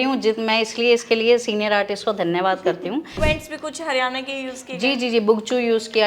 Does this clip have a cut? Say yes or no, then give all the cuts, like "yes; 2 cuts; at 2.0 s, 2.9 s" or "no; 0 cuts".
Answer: yes; 1 cut; at 3.2 s